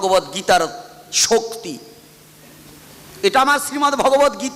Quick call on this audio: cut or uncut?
uncut